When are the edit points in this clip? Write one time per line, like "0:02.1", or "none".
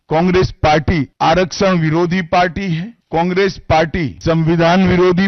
0:01.1
0:02.9
0:04.1